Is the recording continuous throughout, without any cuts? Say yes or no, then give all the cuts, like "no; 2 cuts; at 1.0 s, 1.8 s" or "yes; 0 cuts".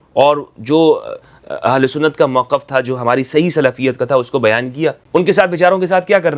no; 1 cut; at 5.0 s